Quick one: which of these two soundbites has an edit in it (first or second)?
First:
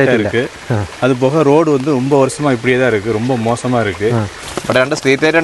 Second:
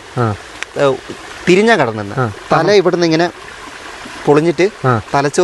first